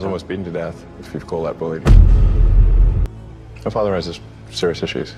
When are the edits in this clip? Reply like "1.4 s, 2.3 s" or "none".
3.1 s